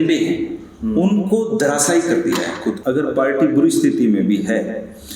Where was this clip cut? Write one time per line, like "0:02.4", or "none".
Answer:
0:02.8

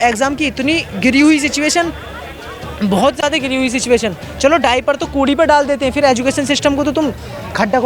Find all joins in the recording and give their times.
none

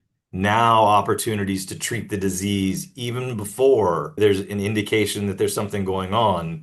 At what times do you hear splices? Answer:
0:04.2

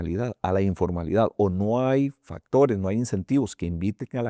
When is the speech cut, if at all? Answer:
none

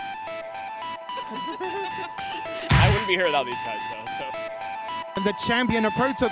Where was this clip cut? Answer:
0:01.2

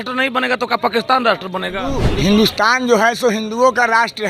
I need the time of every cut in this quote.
0:02.1

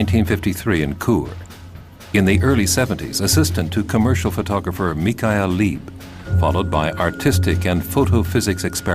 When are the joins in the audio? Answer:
0:01.1

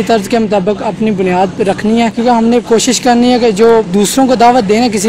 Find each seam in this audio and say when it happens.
0:02.1

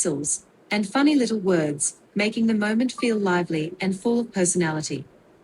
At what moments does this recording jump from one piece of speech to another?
0:03.7

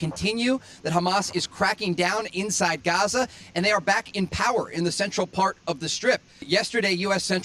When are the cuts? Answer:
0:06.4

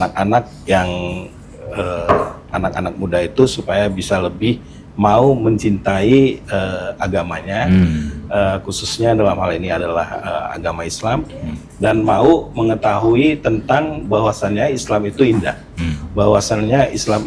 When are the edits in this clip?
none

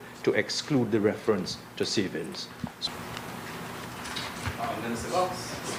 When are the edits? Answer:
none

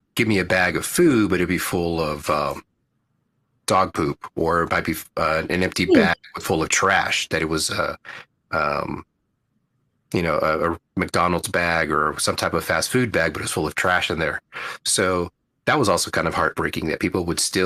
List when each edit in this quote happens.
none

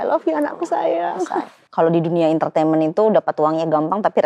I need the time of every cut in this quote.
0:01.6

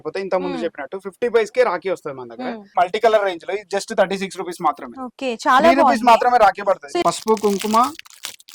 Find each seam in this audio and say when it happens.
0:02.6
0:06.9

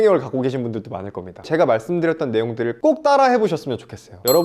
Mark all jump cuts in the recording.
0:01.4

